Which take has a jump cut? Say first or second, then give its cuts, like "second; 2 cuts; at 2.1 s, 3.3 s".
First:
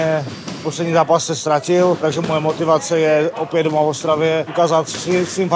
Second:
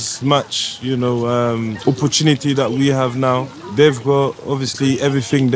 first; 2 cuts; at 2.0 s, 4.5 s